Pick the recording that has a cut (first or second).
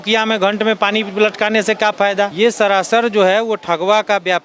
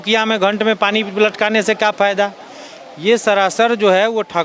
first